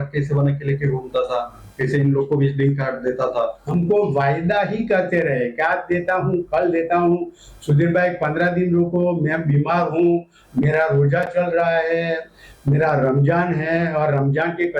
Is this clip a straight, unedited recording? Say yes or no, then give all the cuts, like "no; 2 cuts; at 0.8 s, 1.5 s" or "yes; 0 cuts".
no; 1 cut; at 3.6 s